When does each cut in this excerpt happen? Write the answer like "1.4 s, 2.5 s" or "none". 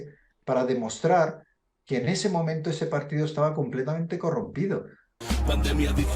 5.1 s